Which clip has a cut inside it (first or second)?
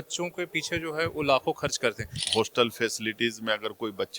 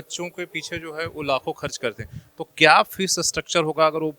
first